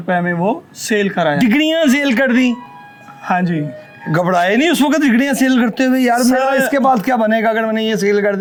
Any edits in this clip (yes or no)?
no